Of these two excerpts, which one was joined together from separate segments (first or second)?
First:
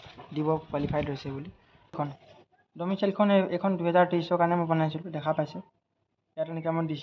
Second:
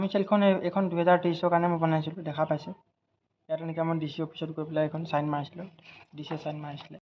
first